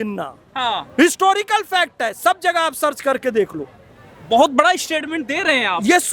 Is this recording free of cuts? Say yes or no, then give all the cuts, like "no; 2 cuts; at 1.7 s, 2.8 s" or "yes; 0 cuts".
yes; 0 cuts